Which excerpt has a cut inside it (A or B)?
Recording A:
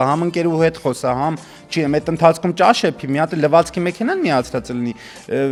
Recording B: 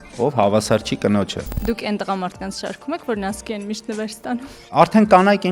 B